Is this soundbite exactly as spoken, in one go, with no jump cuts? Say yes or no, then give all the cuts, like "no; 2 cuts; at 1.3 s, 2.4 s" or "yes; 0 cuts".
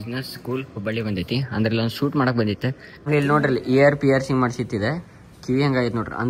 no; 1 cut; at 2.9 s